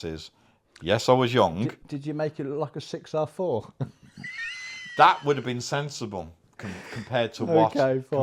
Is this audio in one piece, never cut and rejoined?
yes; 0 cuts

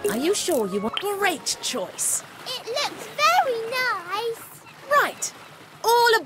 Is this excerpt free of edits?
no; 1 cut; at 0.9 s

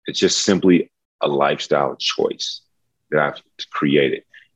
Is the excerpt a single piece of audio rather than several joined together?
yes; 0 cuts

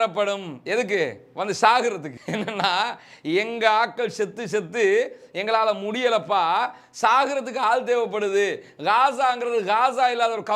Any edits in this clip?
no; 0 cuts

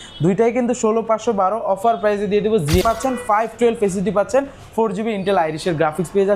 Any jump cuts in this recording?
yes; 1 cut; at 2.8 s

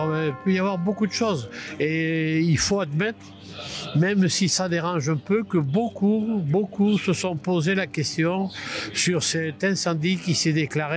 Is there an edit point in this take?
no; 0 cuts

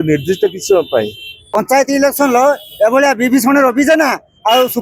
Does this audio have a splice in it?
yes; 1 cut; at 1.4 s

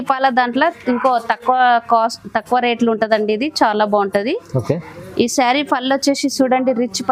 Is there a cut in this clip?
no; 0 cuts

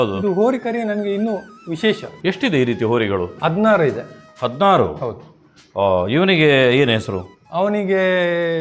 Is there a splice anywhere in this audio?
no; 0 cuts

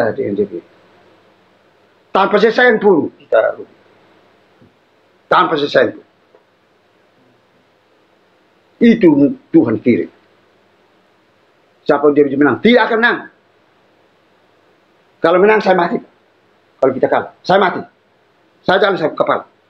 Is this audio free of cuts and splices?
no; 1 cut; at 11.0 s

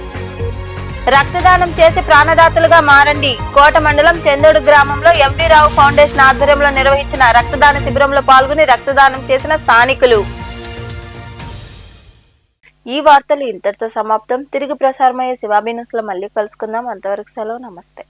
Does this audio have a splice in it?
no; 0 cuts

